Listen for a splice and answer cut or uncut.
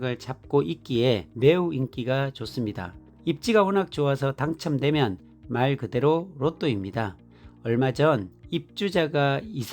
cut